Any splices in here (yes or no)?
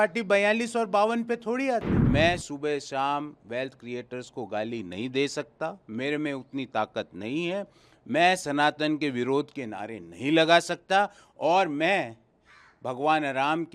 yes